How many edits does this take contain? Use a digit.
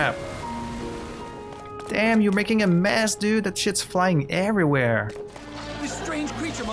2